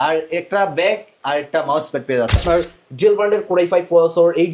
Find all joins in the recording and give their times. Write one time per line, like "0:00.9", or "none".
0:02.4